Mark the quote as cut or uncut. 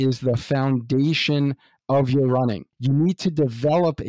cut